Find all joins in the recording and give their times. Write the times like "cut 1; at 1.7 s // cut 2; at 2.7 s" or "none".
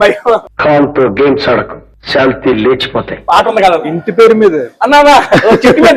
none